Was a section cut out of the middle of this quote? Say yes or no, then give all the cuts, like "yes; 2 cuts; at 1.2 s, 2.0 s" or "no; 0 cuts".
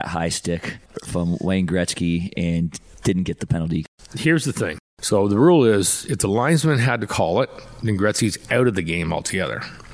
yes; 4 cuts; at 0.9 s, 2.9 s, 3.8 s, 4.9 s